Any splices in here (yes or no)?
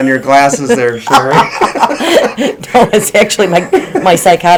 no